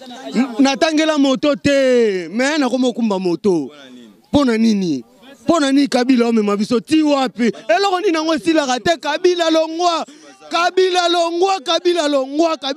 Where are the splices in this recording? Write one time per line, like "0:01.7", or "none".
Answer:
none